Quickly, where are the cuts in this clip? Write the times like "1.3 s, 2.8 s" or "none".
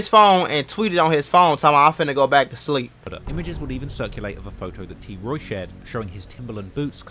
3.0 s